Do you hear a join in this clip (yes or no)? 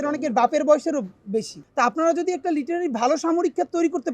yes